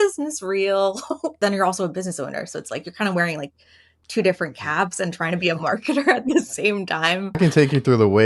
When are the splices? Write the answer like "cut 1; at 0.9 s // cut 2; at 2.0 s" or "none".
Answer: cut 1; at 1.3 s // cut 2; at 7.4 s